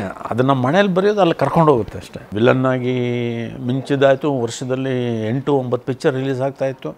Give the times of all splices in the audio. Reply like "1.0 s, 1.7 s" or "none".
2.2 s